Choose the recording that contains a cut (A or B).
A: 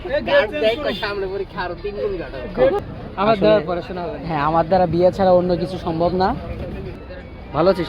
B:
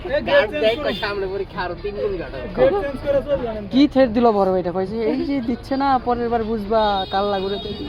A